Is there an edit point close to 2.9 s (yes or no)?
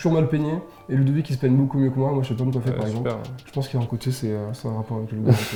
no